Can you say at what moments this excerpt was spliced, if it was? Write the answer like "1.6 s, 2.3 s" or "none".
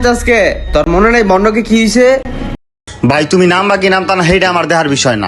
2.6 s